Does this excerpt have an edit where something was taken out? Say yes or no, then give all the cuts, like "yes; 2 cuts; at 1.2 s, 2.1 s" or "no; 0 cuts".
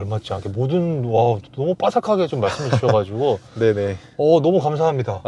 no; 0 cuts